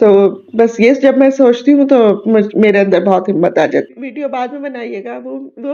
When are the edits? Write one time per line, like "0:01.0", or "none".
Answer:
0:03.9